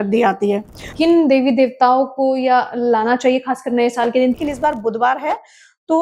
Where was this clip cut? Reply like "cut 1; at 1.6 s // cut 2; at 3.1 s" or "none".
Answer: cut 1; at 0.9 s // cut 2; at 4.3 s